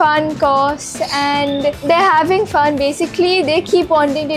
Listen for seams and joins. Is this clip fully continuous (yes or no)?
yes